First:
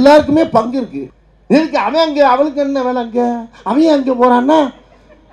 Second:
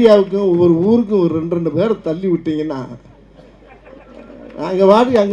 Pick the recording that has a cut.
first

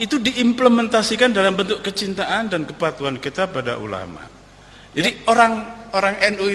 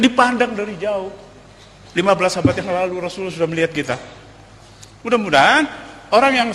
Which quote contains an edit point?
first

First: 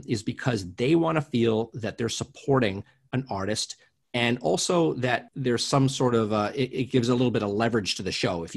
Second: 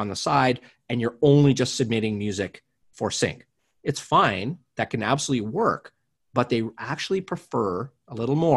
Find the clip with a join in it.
first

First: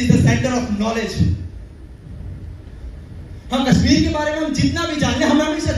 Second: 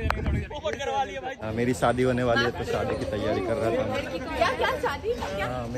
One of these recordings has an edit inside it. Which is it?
second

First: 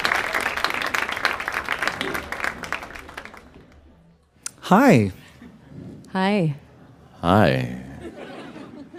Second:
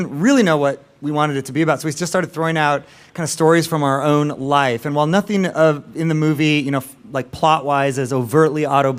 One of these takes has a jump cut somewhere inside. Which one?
second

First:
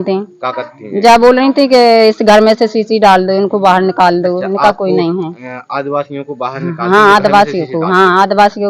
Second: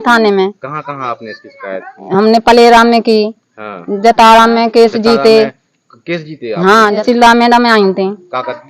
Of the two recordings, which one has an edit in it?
second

